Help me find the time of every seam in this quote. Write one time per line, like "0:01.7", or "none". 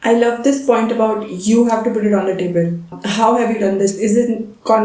none

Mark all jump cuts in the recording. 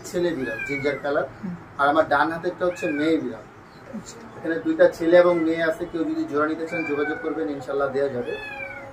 none

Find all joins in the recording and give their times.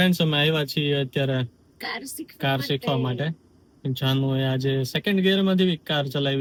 none

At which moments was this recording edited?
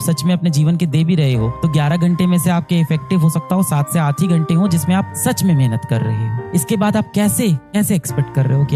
none

